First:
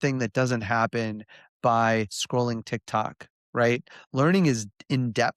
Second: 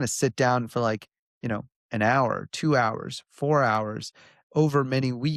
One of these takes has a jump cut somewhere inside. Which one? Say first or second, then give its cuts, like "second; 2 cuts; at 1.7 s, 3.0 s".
first; 1 cut; at 4.0 s